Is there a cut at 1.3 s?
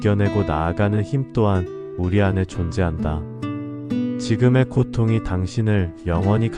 no; 2 cuts; at 3.1 s, 4.3 s

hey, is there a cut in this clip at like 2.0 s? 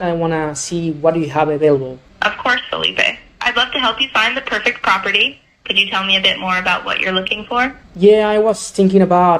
yes; 2 cuts; at 2.0 s, 7.8 s

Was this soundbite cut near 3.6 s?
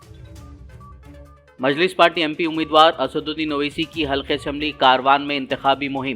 no; 1 cut; at 1.2 s

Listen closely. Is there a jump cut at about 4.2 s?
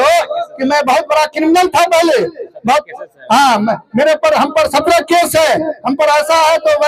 no; 0 cuts

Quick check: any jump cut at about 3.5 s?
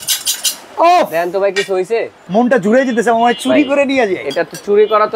no; 1 cut; at 2.2 s

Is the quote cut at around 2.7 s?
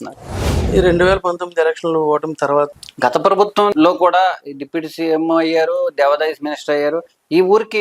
yes; 1 cut; at 2.7 s

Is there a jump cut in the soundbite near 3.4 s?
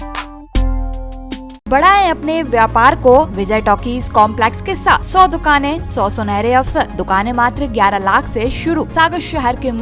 yes; 6 cuts; at 1.7 s, 3.4 s, 5.1 s, 5.8 s, 7.0 s, 8.9 s

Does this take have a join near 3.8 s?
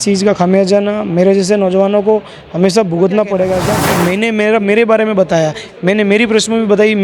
yes; 1 cut; at 3.8 s

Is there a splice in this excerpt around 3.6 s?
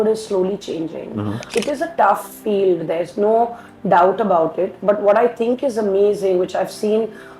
no; 1 cut; at 1.4 s

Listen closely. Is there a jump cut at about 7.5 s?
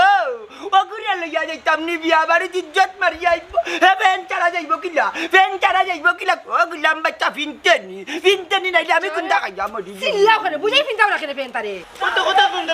no; 1 cut; at 11.8 s

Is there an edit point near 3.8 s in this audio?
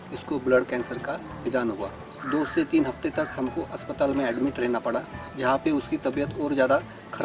no; 2 cuts; at 2.2 s, 5.3 s

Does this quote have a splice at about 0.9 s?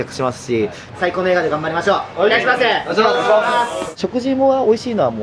yes; 2 cuts; at 0.9 s, 3.9 s

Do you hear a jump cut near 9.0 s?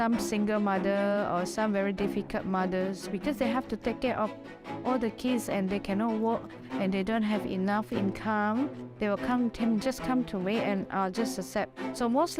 no; 0 cuts

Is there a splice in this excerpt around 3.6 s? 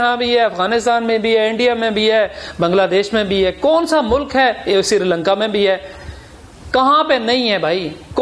no; 0 cuts

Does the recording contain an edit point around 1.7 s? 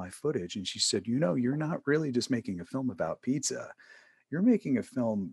no; 0 cuts

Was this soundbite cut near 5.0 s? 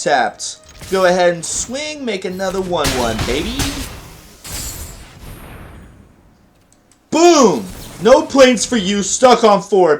yes; 1 cut; at 5.0 s

